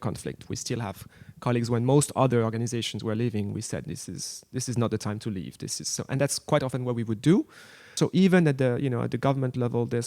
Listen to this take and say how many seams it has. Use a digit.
1